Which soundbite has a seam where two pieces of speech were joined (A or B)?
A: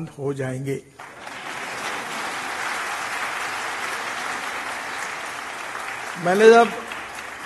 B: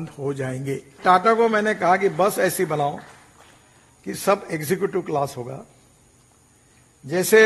B